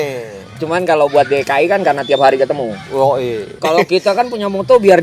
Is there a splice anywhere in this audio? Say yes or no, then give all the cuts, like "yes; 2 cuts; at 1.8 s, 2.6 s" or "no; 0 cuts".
yes; 1 cut; at 3.5 s